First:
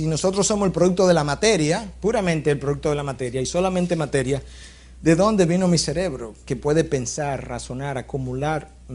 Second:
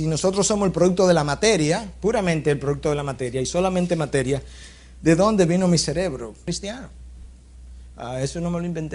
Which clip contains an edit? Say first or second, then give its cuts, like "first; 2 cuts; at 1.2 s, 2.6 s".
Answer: first; 1 cut; at 6.3 s